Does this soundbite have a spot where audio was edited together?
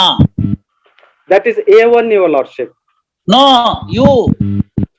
no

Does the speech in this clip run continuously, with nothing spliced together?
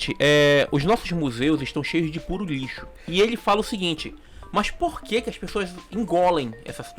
yes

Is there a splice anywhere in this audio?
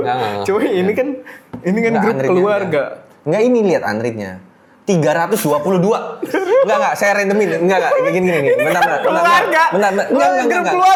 no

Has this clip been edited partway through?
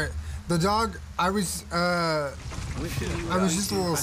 no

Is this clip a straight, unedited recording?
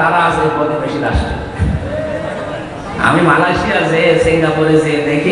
no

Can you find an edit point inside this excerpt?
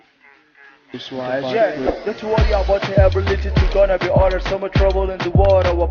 yes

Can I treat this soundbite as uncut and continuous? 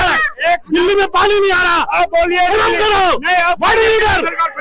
yes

